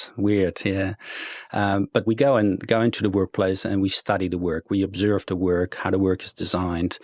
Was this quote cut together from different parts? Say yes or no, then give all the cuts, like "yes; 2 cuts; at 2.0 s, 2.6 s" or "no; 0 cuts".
no; 0 cuts